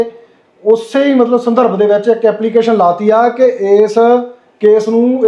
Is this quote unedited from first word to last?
yes; 0 cuts

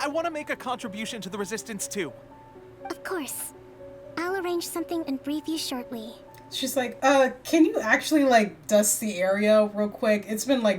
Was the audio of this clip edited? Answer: no; 0 cuts

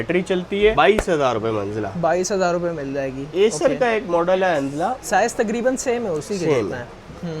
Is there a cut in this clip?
no; 0 cuts

